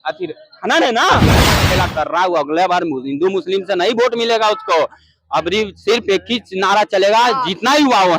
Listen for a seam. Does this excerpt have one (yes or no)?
yes